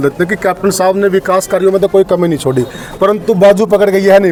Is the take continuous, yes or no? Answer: yes